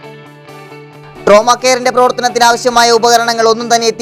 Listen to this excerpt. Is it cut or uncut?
cut